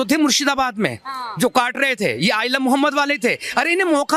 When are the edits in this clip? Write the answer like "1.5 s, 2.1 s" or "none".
none